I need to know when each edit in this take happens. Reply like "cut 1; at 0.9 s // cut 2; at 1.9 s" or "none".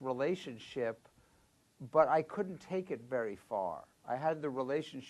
cut 1; at 2.1 s